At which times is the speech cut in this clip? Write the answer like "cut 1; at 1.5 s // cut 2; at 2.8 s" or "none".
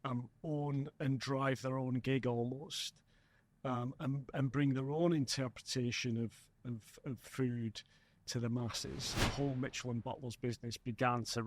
cut 1; at 9.3 s